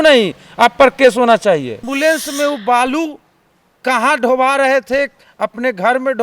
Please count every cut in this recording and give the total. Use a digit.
1